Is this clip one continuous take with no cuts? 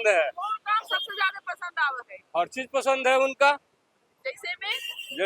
yes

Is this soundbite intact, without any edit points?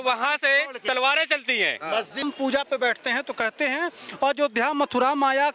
no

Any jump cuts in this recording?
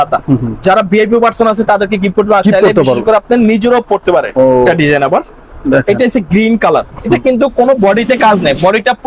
yes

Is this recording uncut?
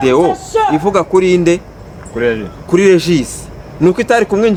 yes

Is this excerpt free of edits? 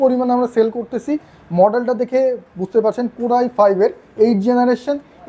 yes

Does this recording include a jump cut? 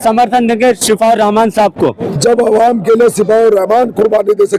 yes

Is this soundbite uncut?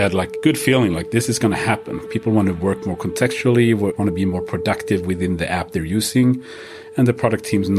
yes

